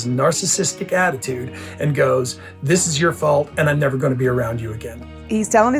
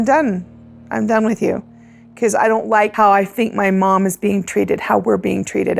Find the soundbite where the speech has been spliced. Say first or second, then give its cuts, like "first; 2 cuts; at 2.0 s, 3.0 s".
second; 1 cut; at 2.9 s